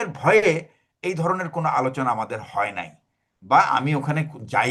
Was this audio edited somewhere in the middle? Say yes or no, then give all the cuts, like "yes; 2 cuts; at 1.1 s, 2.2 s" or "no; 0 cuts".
no; 0 cuts